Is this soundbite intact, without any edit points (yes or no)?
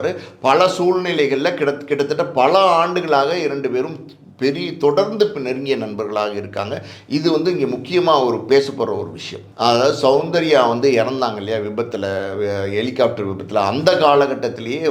no